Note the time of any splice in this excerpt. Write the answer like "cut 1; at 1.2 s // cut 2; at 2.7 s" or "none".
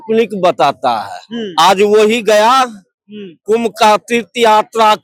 none